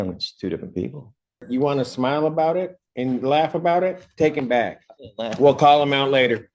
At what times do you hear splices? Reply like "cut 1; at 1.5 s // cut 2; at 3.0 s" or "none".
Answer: cut 1; at 1.4 s